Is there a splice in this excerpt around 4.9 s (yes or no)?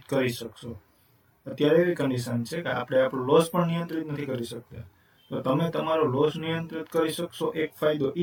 no